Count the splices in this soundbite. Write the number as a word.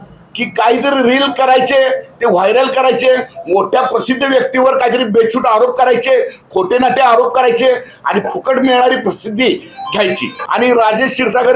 one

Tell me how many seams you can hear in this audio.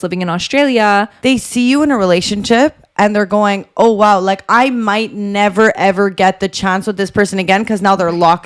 one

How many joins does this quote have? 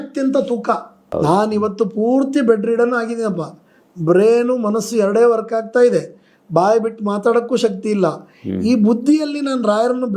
one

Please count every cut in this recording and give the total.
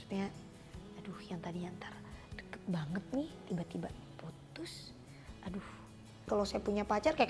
one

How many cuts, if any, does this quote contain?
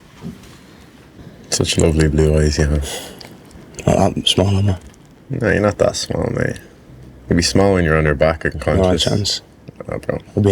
one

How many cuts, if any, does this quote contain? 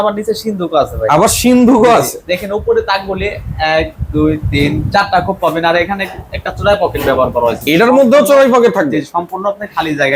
zero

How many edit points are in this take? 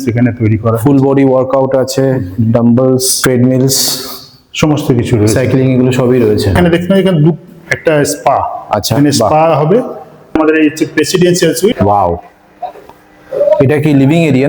four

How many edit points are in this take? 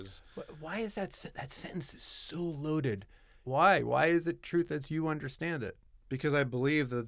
one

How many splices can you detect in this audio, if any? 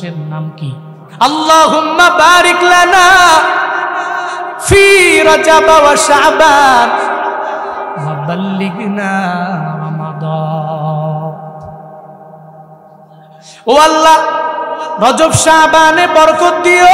one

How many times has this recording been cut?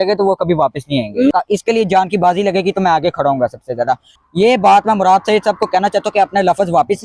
two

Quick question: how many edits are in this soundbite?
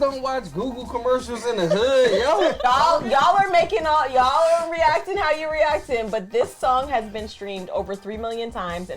one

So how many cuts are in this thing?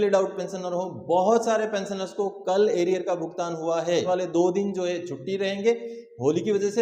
one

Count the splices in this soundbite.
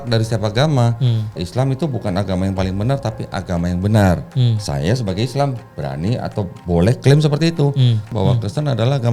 two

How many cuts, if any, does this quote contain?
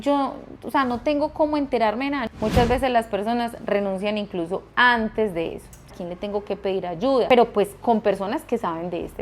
three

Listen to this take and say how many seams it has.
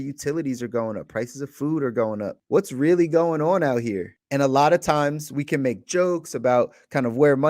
two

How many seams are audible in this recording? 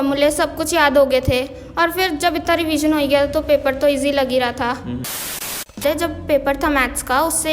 one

